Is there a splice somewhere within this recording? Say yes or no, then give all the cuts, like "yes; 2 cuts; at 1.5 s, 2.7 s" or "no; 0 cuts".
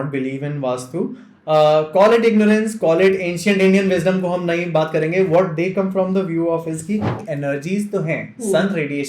yes; 1 cut; at 7.2 s